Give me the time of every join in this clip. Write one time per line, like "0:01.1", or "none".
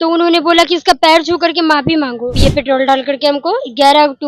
0:02.4